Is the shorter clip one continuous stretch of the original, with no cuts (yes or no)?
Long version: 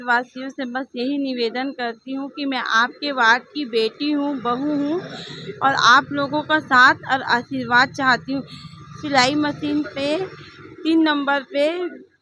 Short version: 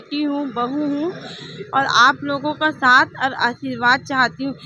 yes